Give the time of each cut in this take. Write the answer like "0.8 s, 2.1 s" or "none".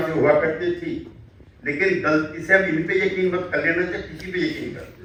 none